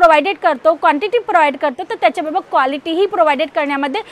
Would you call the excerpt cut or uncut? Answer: uncut